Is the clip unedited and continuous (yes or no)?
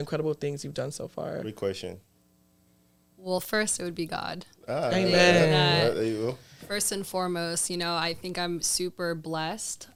yes